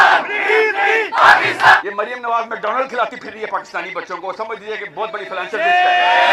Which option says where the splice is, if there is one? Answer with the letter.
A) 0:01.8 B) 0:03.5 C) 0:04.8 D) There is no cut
A